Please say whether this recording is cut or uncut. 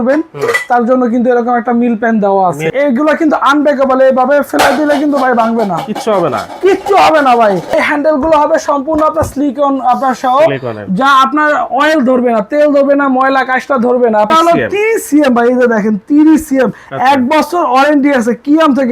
cut